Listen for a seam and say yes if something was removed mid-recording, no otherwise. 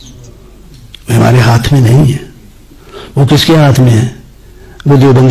no